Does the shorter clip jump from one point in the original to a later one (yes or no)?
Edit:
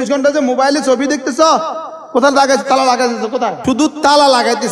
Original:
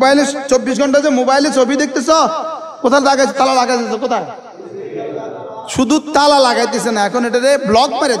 yes